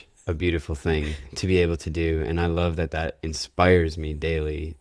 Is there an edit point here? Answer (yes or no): no